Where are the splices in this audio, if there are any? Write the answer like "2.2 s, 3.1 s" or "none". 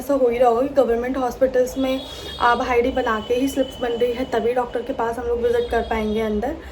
none